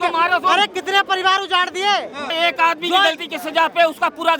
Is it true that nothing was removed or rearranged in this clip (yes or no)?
no